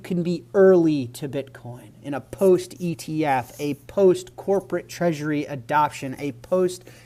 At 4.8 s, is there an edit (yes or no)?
no